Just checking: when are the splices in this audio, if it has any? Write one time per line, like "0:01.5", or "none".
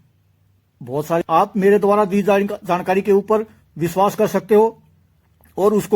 0:01.2